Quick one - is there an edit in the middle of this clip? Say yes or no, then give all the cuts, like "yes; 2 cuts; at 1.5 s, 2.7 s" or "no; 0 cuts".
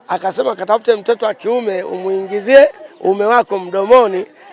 no; 0 cuts